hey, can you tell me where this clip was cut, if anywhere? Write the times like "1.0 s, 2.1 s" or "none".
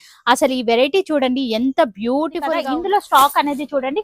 2.6 s